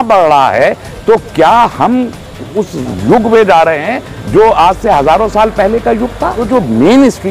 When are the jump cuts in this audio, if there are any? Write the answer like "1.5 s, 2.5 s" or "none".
6.4 s